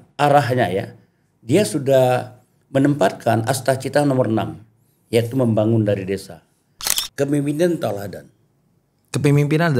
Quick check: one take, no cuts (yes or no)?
no